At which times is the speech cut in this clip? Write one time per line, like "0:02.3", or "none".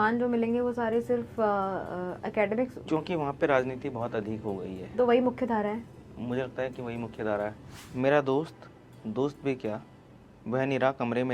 0:07.6